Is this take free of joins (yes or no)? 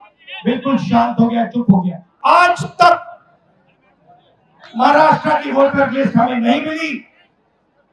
no